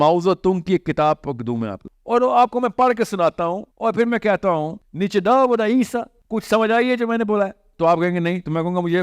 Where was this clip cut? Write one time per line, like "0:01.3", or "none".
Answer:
0:01.8
0:03.7
0:04.8
0:06.2